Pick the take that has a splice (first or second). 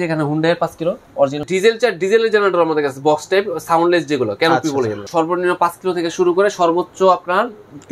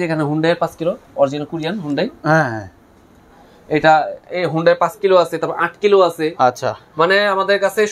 first